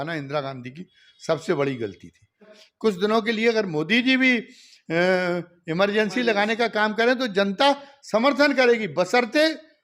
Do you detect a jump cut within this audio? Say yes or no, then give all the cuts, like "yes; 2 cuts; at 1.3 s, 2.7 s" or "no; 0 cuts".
yes; 1 cut; at 2.6 s